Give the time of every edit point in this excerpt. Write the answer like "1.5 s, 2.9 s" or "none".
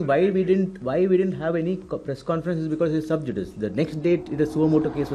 none